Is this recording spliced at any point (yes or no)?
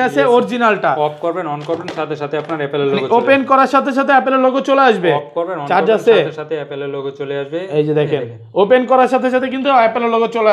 no